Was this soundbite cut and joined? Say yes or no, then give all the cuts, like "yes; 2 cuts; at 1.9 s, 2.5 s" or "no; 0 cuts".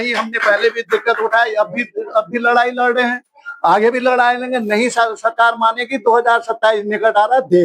no; 0 cuts